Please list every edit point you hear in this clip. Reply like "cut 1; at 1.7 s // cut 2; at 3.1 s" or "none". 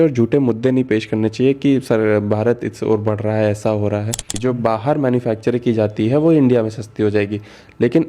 cut 1; at 4.3 s

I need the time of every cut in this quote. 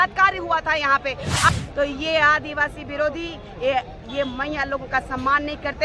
cut 1; at 1.5 s

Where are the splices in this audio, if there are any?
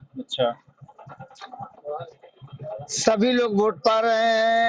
none

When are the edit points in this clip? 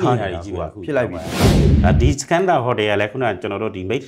cut 1; at 1.6 s

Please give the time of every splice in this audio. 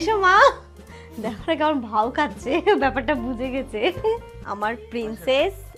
cut 1; at 4.4 s

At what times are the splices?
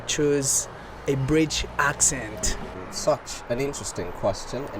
cut 1; at 2.8 s

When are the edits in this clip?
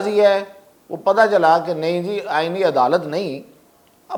none

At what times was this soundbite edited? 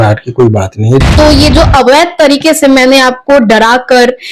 cut 1; at 1.0 s

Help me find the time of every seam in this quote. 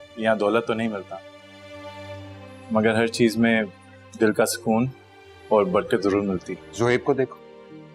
cut 1; at 6.6 s

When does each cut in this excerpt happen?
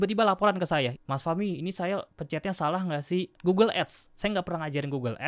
cut 1; at 0.9 s // cut 2; at 3.4 s

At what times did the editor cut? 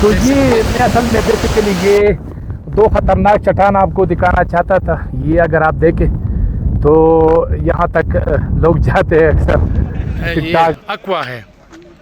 cut 1; at 10.8 s

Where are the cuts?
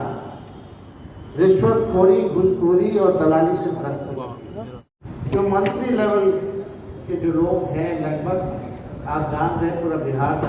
cut 1; at 5.0 s

